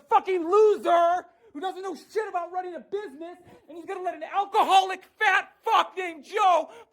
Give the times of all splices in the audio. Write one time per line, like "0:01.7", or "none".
0:01.3